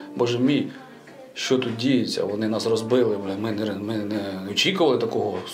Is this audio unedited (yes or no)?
yes